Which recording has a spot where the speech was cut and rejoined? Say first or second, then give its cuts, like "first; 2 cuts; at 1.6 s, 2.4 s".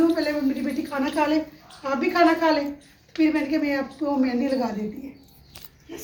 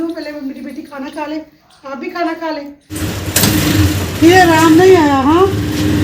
second; 1 cut; at 3.0 s